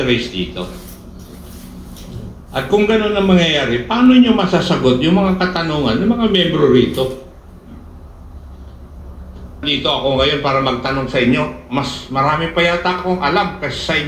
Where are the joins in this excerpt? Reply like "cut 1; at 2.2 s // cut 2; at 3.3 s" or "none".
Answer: cut 1; at 9.6 s